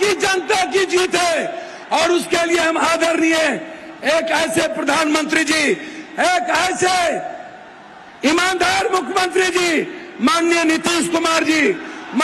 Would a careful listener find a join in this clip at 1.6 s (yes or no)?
no